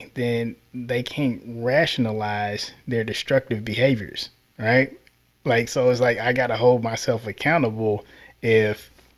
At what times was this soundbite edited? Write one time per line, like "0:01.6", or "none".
none